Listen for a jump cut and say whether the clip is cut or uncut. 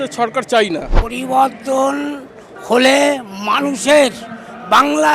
cut